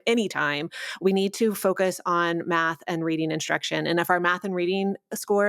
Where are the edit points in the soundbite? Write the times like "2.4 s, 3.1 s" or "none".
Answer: none

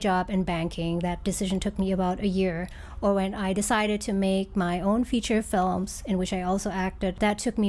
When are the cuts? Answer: none

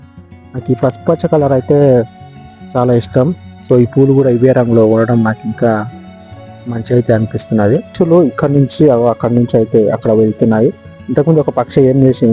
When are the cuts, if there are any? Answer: 7.9 s

